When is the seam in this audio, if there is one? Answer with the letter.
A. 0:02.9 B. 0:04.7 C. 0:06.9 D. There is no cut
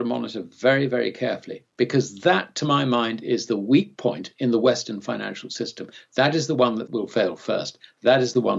C